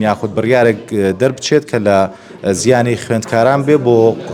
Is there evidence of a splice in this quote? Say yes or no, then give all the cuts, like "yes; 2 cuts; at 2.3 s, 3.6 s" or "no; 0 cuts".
no; 0 cuts